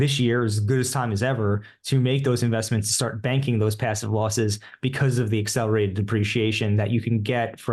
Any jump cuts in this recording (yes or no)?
no